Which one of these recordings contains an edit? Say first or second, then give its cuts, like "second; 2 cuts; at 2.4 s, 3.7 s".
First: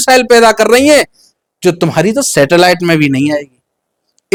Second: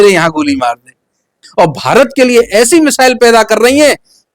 second; 1 cut; at 1.5 s